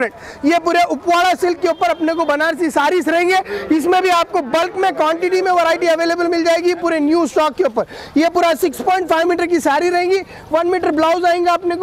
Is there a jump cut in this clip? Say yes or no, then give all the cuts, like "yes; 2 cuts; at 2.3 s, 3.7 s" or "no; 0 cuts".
no; 0 cuts